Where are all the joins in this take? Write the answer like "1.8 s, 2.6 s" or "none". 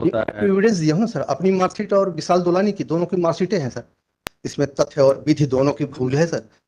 4.2 s